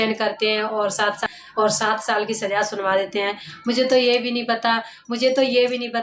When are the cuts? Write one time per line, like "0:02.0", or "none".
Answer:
0:01.2